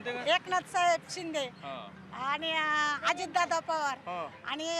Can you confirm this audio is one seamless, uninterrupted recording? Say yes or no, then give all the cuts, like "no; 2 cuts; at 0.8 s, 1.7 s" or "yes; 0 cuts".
yes; 0 cuts